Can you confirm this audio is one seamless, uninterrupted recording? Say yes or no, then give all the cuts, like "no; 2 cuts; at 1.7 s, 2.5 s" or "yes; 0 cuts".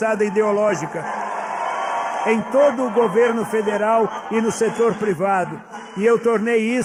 yes; 0 cuts